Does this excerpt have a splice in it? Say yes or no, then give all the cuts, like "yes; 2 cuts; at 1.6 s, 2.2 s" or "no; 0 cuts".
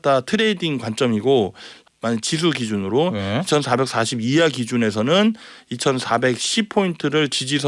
yes; 1 cut; at 1.7 s